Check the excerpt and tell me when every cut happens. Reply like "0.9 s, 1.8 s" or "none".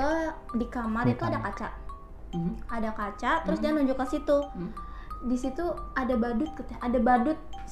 none